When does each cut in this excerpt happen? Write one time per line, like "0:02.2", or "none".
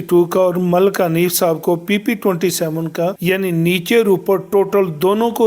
none